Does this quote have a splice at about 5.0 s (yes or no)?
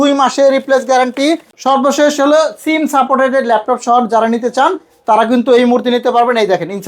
no